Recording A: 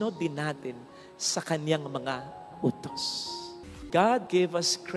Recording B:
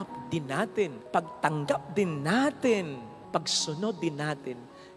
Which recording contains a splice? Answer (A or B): A